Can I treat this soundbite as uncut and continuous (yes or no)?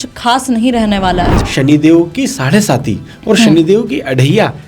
no